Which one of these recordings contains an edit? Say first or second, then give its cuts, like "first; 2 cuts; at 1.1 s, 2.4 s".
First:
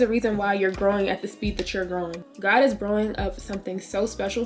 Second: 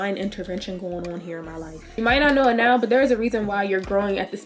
second; 1 cut; at 2.0 s